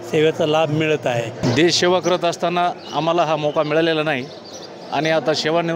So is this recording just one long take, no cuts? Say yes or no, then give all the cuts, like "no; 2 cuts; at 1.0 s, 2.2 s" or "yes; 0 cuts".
no; 1 cut; at 1.4 s